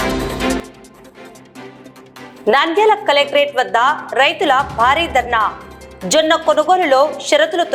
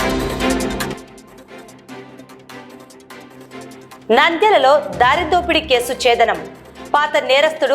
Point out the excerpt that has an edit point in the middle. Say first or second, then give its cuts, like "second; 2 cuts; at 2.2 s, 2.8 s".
second; 2 cuts; at 1.0 s, 3.7 s